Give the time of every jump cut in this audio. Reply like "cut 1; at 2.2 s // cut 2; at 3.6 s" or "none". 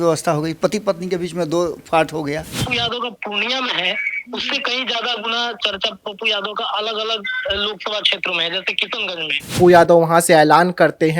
cut 1; at 2.6 s // cut 2; at 9.5 s